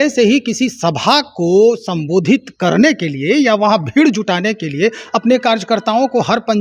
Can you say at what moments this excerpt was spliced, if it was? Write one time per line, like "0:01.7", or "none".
none